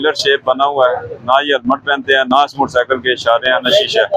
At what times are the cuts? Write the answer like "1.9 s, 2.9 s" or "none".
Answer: none